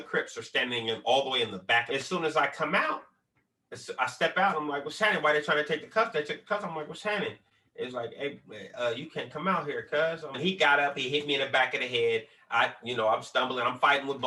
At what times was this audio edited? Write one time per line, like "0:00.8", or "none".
0:01.9
0:10.4